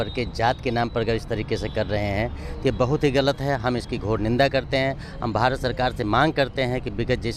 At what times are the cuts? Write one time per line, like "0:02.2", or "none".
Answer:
none